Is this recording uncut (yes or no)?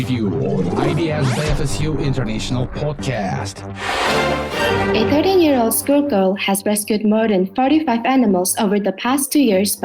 no